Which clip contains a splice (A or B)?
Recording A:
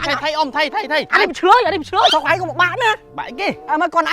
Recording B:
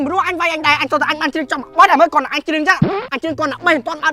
A